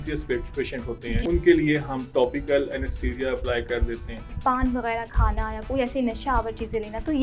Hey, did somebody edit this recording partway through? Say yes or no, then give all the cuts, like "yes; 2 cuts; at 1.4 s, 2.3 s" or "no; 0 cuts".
yes; 2 cuts; at 1.2 s, 4.4 s